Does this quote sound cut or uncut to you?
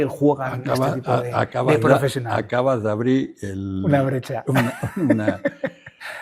uncut